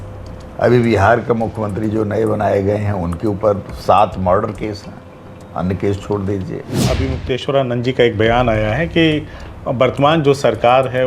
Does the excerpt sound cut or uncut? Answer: cut